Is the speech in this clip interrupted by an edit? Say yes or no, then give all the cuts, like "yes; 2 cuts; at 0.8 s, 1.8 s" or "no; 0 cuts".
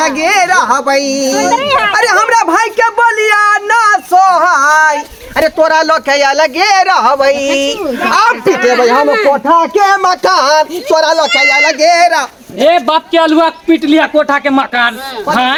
no; 0 cuts